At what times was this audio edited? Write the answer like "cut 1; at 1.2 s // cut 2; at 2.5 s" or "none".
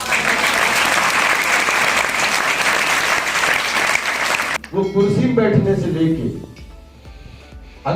cut 1; at 4.5 s